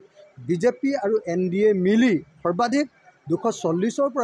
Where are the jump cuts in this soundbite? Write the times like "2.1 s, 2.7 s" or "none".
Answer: none